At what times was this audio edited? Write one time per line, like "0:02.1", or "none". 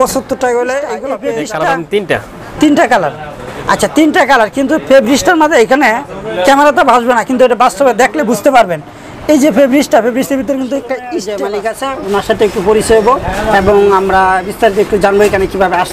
0:01.1
0:11.2